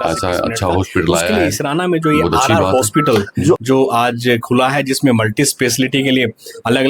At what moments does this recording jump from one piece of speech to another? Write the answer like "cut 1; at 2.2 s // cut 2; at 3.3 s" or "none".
cut 1; at 1.3 s